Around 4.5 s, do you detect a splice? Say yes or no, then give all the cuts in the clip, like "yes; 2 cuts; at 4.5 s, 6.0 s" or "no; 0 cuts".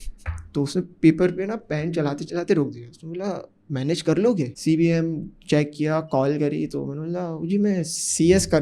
yes; 1 cut; at 4.5 s